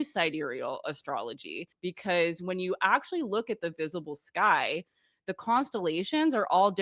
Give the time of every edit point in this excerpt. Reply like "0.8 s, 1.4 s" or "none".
1.7 s